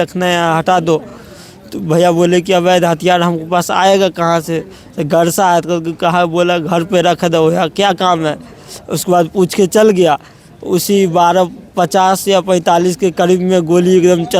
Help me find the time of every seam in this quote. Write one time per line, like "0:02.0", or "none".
none